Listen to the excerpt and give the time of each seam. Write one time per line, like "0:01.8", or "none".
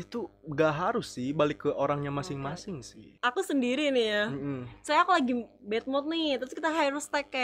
0:03.1